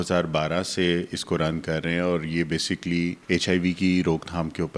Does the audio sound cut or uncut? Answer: cut